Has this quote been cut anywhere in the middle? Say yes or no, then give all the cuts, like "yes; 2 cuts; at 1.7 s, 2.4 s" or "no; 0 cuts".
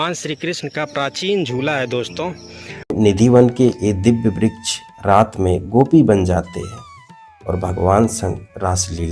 yes; 1 cut; at 2.9 s